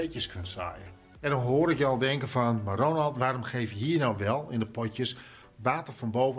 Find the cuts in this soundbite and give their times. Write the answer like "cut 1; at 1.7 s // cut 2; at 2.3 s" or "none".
cut 1; at 0.9 s